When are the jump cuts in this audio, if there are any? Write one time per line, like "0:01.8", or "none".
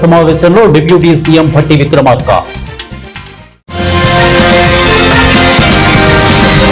none